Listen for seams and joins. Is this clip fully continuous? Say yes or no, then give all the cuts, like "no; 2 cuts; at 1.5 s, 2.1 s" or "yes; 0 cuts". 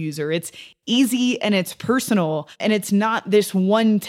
no; 1 cut; at 2.6 s